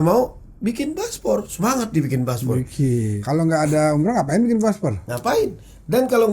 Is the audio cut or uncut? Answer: cut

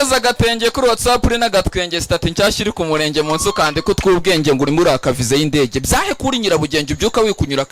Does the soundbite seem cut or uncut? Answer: uncut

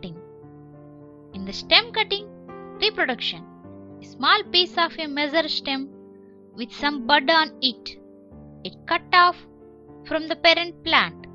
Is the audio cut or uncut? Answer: cut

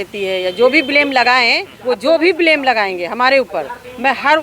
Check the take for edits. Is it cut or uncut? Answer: cut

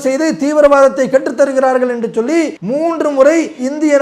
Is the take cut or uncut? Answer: cut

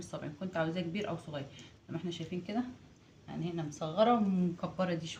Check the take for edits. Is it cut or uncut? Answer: uncut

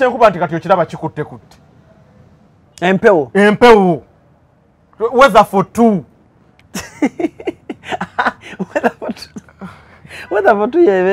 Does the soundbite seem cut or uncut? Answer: uncut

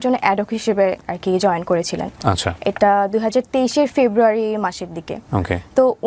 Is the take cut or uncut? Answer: uncut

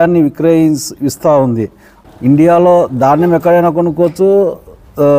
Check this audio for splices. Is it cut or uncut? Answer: cut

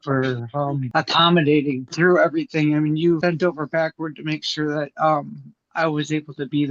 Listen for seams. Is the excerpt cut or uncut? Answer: cut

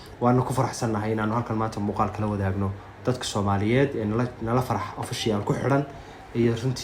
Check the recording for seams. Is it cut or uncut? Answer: uncut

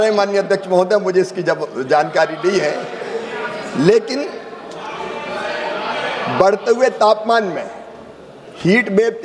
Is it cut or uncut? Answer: uncut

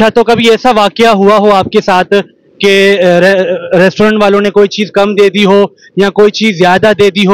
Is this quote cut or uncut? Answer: uncut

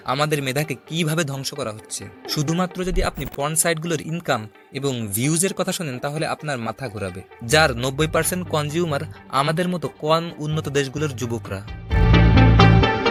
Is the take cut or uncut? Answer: uncut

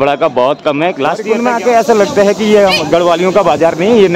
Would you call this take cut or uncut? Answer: cut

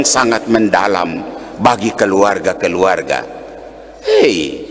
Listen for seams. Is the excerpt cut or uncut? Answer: uncut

